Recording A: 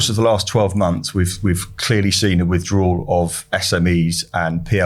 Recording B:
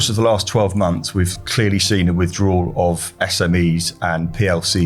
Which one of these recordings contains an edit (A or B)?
B